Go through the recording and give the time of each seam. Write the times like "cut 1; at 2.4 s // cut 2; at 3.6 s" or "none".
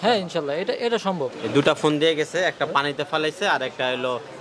cut 1; at 1.4 s